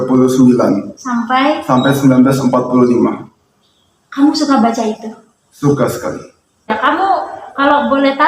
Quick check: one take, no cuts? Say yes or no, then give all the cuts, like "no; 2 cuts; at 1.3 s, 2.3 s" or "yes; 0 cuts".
no; 1 cut; at 6.7 s